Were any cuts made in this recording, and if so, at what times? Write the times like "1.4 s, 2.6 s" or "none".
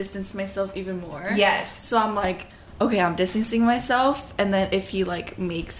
none